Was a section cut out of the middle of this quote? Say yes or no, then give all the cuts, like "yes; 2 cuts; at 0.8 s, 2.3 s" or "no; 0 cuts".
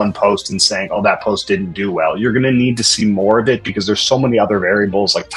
no; 0 cuts